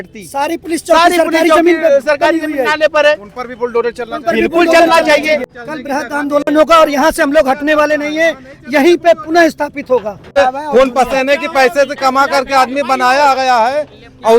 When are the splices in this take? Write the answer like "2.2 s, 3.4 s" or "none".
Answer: 5.6 s, 10.4 s